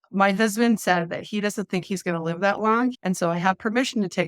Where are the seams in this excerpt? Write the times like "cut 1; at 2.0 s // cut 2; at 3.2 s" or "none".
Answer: cut 1; at 3.0 s